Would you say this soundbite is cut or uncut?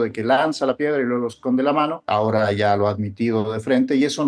cut